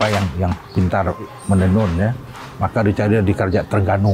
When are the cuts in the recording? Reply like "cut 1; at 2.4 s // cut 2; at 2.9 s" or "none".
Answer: cut 1; at 1.4 s